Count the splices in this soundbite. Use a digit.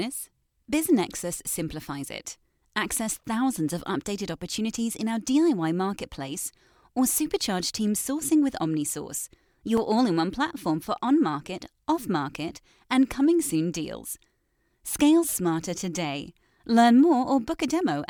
0